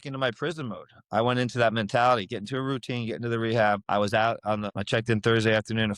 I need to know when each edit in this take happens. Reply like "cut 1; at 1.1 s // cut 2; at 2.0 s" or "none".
cut 1; at 3.8 s // cut 2; at 4.7 s